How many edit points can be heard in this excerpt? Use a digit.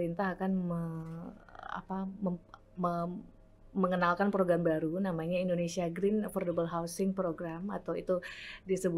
0